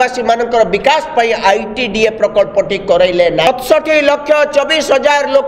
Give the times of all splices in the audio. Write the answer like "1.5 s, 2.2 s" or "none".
3.5 s

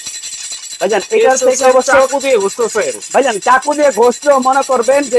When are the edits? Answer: none

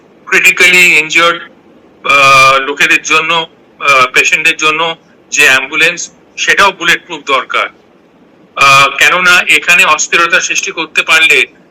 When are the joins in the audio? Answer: none

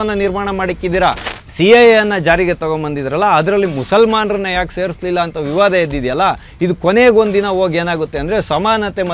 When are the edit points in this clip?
1.3 s

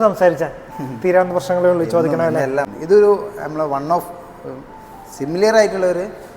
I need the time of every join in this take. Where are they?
2.7 s

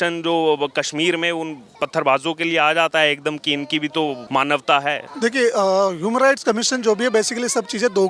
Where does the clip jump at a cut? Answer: 4.2 s, 5.1 s

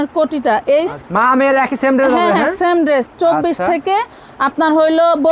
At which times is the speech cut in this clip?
1.0 s

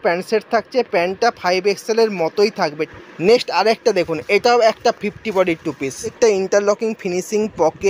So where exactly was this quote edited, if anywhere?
2.9 s, 6.1 s

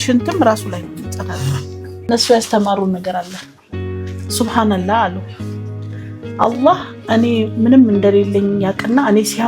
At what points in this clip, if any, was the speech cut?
2.1 s

